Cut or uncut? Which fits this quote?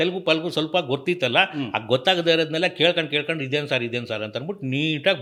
uncut